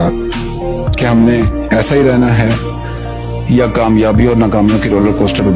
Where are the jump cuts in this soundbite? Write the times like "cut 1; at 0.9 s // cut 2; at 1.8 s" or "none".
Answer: none